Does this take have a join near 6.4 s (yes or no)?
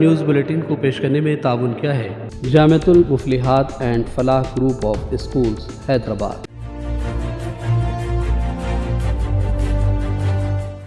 yes